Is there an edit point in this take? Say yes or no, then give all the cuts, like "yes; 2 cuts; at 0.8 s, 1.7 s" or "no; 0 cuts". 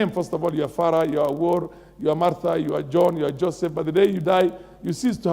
no; 0 cuts